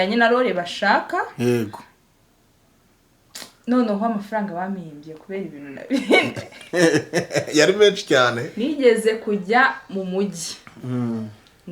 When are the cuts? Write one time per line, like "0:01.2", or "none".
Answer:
0:08.5